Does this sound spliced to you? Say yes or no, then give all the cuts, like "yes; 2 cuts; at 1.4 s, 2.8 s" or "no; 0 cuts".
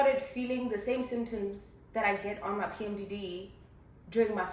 no; 0 cuts